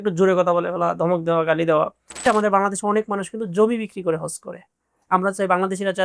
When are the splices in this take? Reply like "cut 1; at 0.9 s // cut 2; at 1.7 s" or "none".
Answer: cut 1; at 2.2 s // cut 2; at 5.0 s